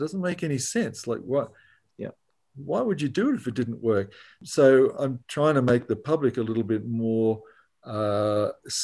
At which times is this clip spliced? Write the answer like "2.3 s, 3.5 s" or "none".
4.4 s, 5.2 s